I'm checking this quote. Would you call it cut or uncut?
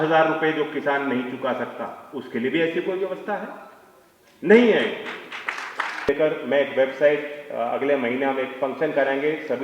cut